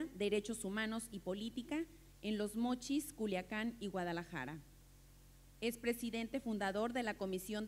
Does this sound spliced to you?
yes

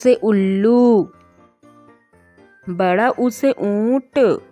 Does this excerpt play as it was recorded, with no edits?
no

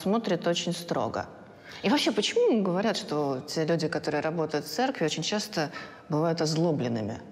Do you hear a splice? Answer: no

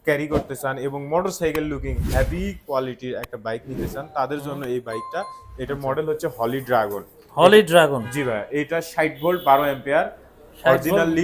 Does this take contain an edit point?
no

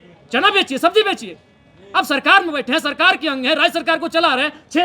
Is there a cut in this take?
no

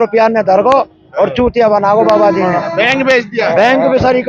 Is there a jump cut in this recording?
no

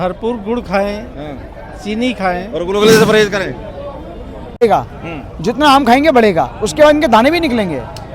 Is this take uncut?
no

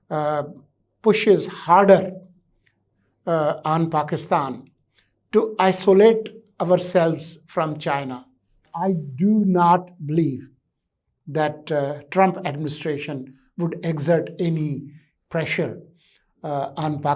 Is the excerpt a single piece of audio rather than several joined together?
no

